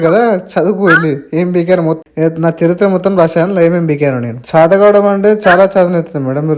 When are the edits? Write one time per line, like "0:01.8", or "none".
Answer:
0:02.0
0:04.3